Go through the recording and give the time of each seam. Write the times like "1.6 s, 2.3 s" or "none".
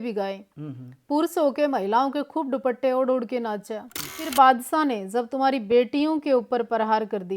4.2 s